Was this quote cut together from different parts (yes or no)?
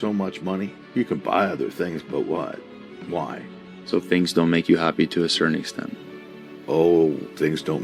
no